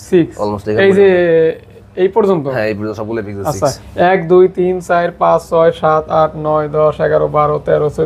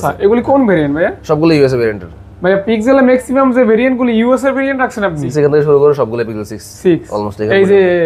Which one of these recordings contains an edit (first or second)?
second